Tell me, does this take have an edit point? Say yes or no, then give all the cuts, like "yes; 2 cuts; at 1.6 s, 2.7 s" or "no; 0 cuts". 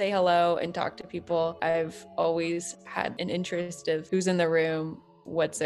yes; 1 cut; at 1.6 s